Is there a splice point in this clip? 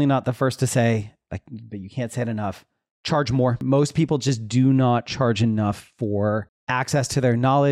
yes; 2 cuts; at 3.6 s, 6.6 s

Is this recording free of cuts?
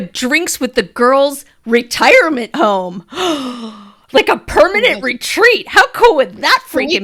yes; 0 cuts

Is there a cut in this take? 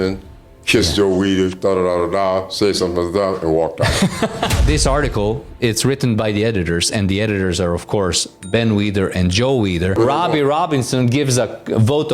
yes; 2 cuts; at 4.6 s, 10.0 s

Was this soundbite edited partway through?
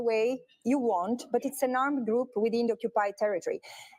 yes; 1 cut; at 1.5 s

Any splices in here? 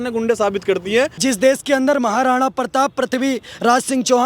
yes; 1 cut; at 1.1 s

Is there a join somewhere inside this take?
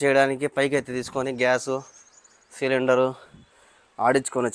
no; 0 cuts

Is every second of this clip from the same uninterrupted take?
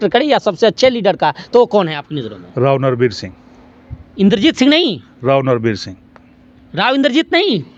yes; 0 cuts

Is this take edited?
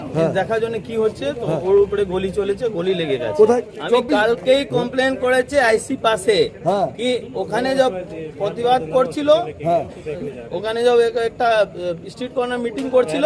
yes; 1 cut; at 3.6 s

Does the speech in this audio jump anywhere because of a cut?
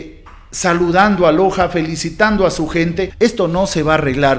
yes; 1 cut; at 3.1 s

